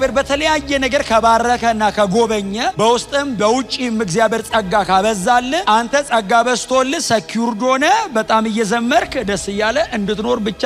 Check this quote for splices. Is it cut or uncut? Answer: uncut